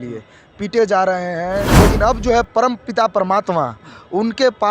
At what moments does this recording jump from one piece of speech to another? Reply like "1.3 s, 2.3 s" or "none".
1.7 s